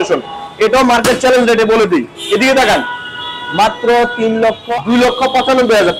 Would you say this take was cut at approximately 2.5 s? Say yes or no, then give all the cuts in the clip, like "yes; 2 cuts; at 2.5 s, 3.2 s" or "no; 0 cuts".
no; 1 cut; at 4.7 s